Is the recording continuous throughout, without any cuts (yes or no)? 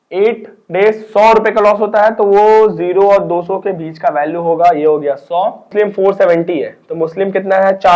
no